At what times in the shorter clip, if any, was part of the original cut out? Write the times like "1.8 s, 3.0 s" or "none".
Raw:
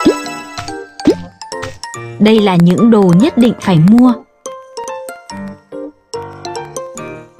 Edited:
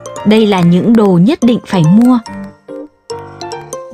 2.3 s